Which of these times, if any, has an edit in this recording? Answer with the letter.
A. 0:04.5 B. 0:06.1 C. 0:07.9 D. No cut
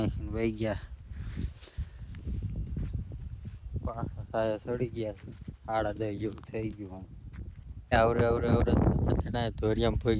C